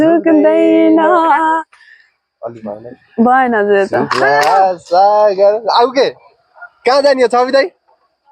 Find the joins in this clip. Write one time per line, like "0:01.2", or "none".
none

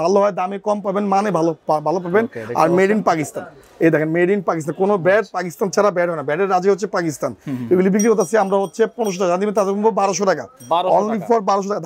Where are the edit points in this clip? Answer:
none

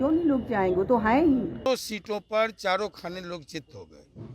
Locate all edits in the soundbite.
0:01.7

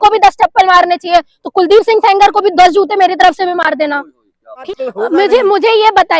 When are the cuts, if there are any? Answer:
0:04.6

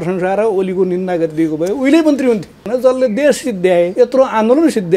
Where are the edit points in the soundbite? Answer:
0:02.6
0:03.9

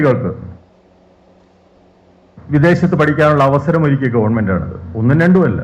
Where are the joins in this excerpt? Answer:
none

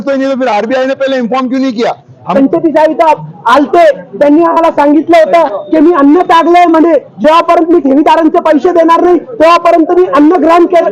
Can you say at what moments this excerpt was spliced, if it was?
0:02.3

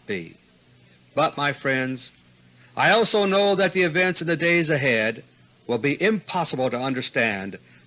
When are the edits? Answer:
0:06.4

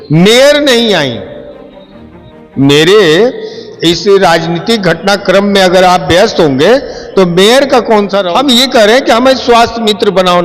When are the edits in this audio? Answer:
0:08.2

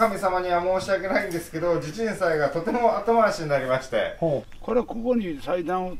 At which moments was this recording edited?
0:04.4

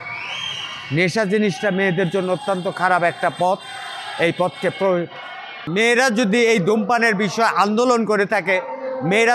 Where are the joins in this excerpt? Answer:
0:05.6

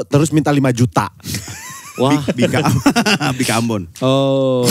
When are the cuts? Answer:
none

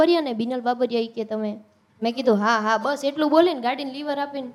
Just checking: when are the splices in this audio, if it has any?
none

